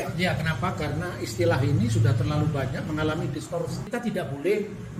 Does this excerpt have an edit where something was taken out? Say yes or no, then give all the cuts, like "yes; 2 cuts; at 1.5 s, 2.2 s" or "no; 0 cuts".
yes; 1 cut; at 3.8 s